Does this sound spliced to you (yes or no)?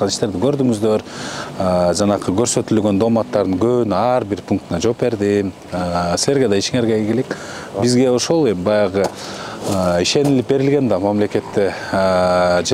no